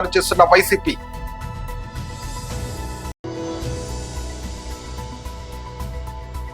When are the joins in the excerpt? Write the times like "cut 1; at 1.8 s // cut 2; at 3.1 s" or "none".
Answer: cut 1; at 1.0 s // cut 2; at 2.9 s